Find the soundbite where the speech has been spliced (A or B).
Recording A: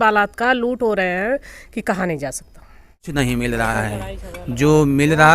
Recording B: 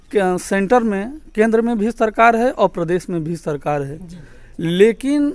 A